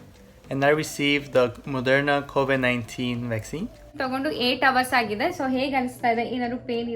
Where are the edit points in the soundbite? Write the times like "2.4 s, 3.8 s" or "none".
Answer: 4.0 s